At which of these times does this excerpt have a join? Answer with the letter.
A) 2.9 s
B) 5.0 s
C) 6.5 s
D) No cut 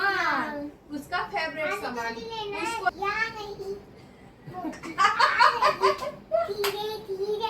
A